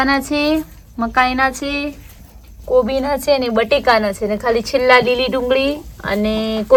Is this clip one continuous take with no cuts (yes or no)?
yes